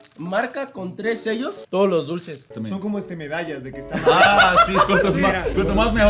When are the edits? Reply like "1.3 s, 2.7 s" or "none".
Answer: none